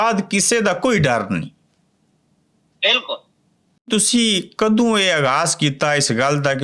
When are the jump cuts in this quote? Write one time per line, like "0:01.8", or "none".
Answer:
0:03.9